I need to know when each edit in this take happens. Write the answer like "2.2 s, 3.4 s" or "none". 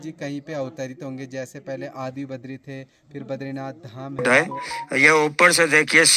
4.2 s